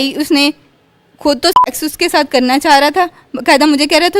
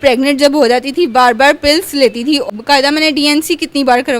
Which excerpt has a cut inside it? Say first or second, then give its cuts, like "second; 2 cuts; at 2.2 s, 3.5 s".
second; 1 cut; at 2.5 s